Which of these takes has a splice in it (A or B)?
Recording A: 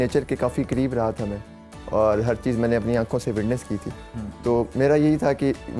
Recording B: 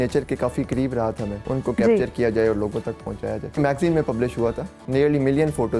B